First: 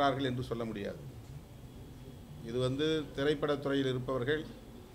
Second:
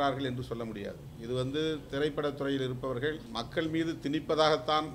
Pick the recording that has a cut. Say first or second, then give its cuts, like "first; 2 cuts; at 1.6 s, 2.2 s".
second; 2 cuts; at 1.1 s, 3.3 s